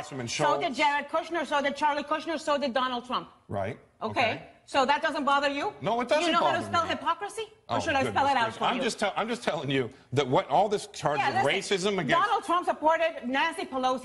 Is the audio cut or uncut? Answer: cut